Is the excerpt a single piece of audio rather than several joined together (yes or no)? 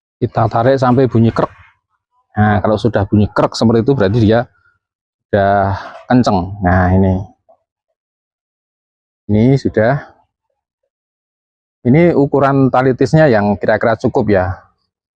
yes